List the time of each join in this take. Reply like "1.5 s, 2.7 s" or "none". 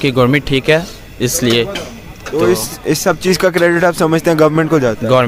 none